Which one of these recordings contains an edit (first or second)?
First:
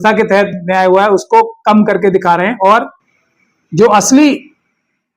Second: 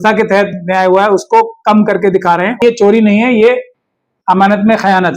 second